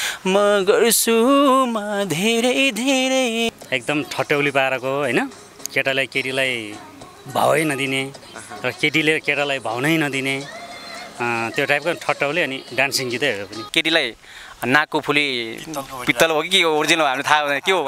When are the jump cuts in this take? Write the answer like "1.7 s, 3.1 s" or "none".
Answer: 3.5 s, 13.6 s